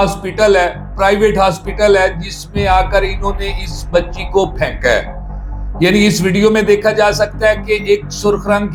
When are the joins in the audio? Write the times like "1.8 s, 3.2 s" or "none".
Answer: none